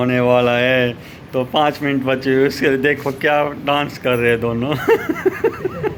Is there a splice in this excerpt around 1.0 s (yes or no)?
no